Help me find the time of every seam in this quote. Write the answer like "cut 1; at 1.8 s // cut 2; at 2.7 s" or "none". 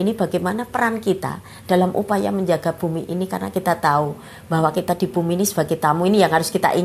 none

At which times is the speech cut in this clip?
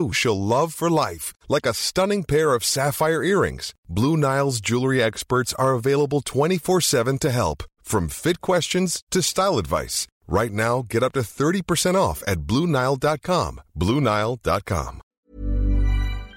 cut 1; at 15.0 s

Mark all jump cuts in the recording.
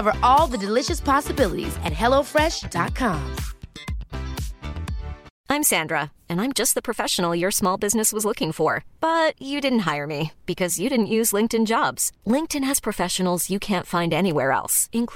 cut 1; at 5.2 s

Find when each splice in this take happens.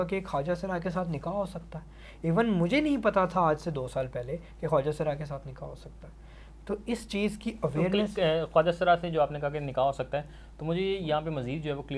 none

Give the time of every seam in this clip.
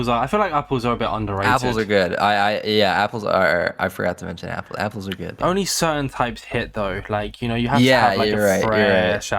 none

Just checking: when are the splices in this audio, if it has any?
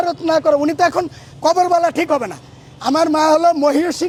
none

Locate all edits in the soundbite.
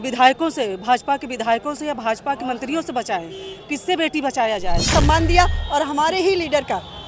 cut 1; at 4.9 s

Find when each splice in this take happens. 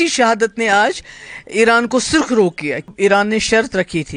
cut 1; at 2.9 s

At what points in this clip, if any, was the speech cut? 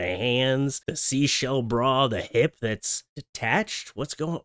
none

